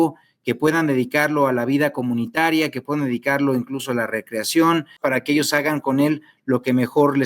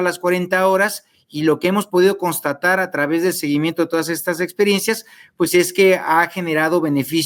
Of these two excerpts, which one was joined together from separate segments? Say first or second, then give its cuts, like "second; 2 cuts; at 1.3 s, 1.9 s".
first; 1 cut; at 5.0 s